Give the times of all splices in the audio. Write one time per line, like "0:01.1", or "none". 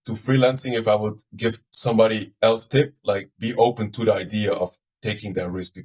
none